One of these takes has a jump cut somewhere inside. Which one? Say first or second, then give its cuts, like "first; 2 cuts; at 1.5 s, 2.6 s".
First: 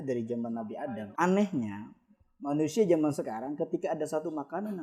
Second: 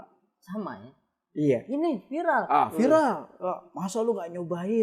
first; 1 cut; at 1.0 s